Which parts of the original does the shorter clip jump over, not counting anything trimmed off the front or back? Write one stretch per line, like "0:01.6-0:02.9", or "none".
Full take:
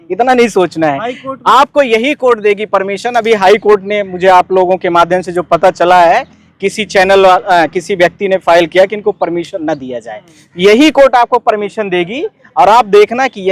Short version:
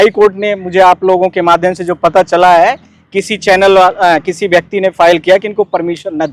none